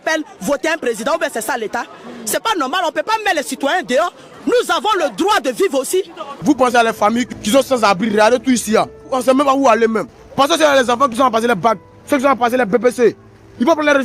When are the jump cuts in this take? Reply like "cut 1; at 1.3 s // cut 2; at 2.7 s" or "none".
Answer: cut 1; at 6.2 s